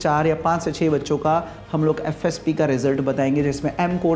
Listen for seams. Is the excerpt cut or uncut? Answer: uncut